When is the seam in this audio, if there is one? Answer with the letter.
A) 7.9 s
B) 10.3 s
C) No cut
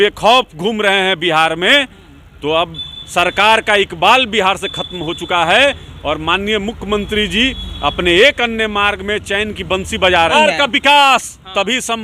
B